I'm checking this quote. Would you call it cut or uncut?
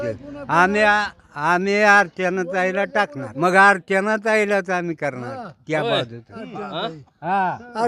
cut